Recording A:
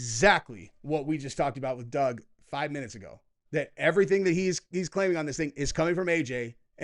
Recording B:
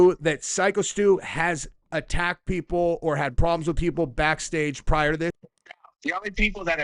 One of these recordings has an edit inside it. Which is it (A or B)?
B